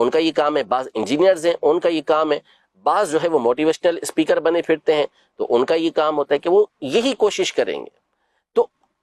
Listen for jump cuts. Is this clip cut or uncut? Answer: uncut